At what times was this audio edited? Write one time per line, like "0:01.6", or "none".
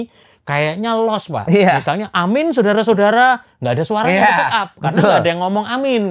none